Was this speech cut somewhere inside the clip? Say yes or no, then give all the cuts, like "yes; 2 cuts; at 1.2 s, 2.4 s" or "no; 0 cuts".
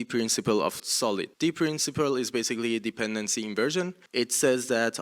yes; 2 cuts; at 0.9 s, 4.0 s